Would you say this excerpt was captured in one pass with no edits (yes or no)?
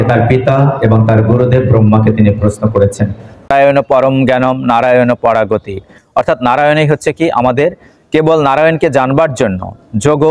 no